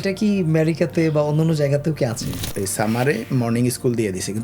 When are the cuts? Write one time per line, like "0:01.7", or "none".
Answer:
0:02.4